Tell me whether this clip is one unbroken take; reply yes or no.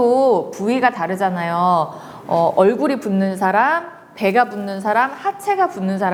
yes